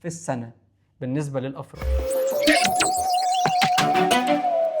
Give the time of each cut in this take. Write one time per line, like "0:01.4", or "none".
0:01.9